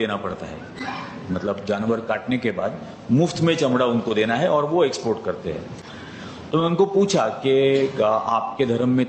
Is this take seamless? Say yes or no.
yes